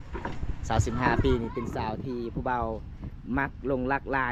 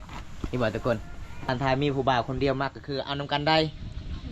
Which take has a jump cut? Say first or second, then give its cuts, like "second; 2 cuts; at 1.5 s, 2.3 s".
second; 1 cut; at 1.3 s